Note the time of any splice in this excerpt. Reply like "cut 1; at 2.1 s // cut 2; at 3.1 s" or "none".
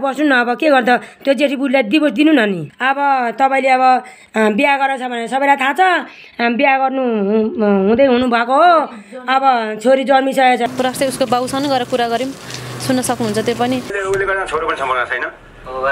none